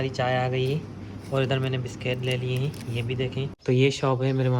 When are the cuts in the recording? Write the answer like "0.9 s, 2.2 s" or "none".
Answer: 3.6 s